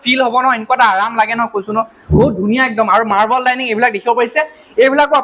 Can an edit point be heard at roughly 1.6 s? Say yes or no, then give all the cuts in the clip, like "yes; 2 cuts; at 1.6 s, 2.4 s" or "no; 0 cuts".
no; 0 cuts